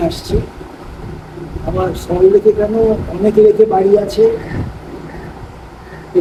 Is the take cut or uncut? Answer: uncut